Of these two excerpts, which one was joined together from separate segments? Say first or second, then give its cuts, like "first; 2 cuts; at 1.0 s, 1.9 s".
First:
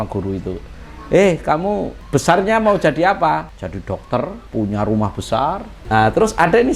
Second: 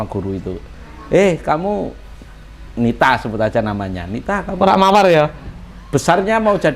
first; 4 cuts; at 2.0 s, 3.6 s, 4.4 s, 5.7 s